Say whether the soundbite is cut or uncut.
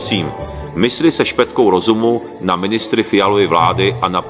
uncut